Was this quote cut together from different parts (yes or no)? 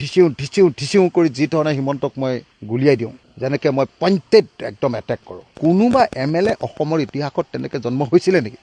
yes